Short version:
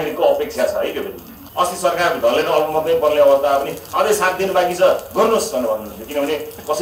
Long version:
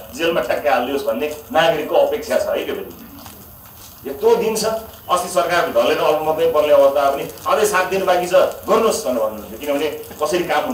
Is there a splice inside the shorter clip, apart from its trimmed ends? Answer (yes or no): yes